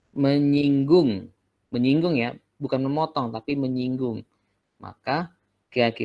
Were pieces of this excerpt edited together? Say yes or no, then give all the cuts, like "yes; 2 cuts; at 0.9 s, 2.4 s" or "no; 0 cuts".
no; 0 cuts